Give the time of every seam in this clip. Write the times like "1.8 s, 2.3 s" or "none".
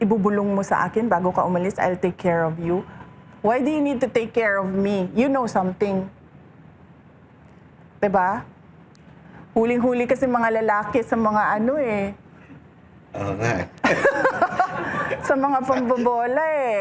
none